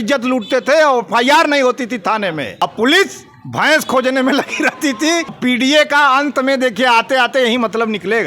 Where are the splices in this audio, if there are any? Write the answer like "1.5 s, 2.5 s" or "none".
2.6 s, 5.4 s